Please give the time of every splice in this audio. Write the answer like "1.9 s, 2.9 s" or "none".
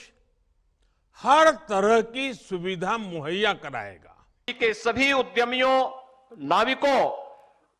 4.5 s